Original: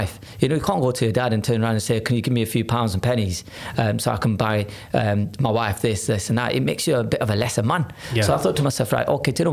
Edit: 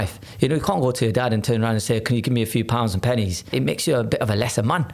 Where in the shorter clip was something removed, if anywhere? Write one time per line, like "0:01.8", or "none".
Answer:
0:03.5